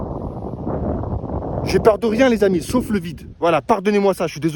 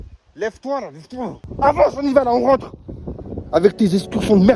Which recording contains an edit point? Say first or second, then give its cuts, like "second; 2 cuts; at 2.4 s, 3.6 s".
second; 1 cut; at 1.4 s